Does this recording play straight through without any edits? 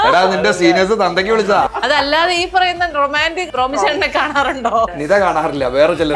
no; 3 cuts; at 1.7 s, 3.5 s, 5.0 s

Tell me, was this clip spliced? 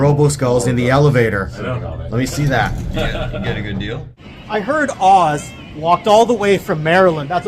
yes; 1 cut; at 4.2 s

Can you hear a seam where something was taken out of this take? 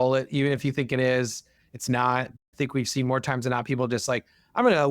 yes; 1 cut; at 2.5 s

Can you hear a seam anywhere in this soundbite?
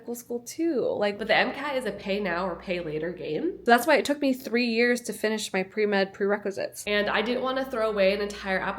yes; 3 cuts; at 1.2 s, 3.6 s, 6.8 s

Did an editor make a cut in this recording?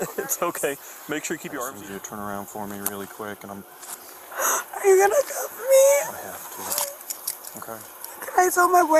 yes; 1 cut; at 1.5 s

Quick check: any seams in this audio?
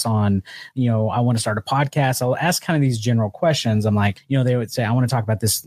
yes; 1 cut; at 4.2 s

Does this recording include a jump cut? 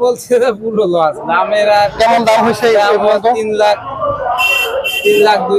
no; 0 cuts

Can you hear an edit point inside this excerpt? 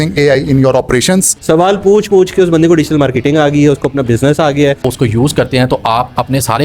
yes; 2 cuts; at 1.3 s, 4.8 s

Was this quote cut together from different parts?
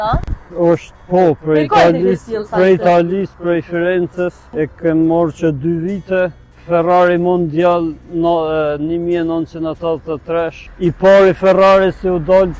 yes; 2 cuts; at 4.4 s, 10.6 s

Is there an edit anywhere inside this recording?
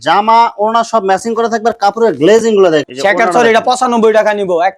yes; 1 cut; at 2.9 s

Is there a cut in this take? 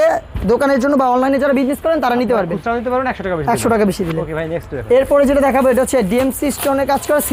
no; 0 cuts

